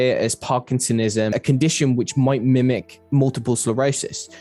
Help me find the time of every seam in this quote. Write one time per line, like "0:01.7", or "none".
0:01.3

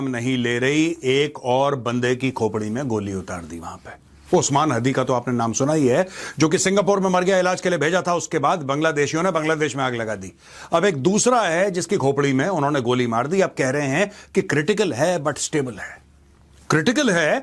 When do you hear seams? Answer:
none

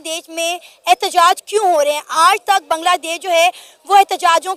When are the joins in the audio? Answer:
none

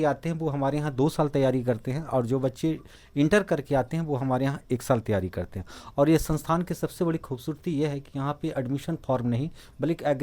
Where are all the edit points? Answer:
none

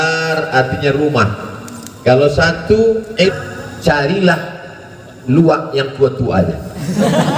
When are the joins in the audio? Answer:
0:03.3

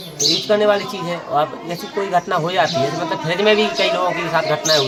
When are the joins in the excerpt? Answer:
none

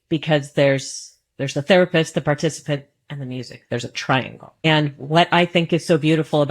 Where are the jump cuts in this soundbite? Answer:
0:04.6

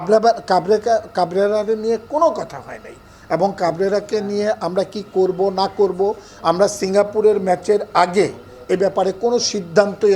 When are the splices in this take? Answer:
none

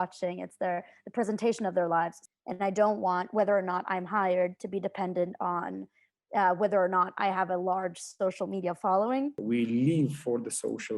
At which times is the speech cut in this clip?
0:02.2
0:09.4

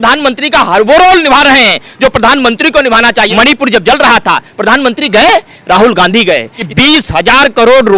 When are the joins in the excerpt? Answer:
0:03.3
0:06.6

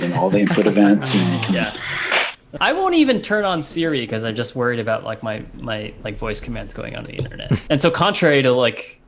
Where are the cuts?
0:02.4
0:07.6

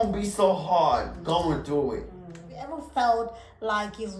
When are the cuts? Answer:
0:02.7

